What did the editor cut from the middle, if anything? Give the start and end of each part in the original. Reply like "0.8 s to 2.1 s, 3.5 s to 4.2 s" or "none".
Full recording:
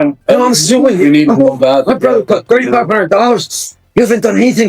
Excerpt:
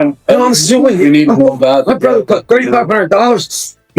none